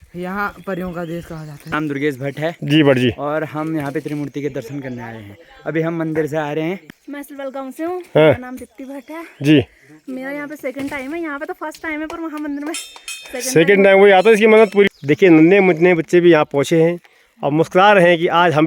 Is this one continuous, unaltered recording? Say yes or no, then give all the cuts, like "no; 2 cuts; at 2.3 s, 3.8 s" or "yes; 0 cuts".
no; 3 cuts; at 1.7 s, 6.7 s, 14.9 s